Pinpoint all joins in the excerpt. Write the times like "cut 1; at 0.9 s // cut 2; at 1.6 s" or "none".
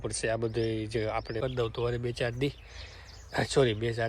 cut 1; at 1.4 s